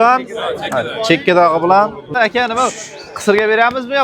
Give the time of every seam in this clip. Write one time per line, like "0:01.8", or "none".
0:02.1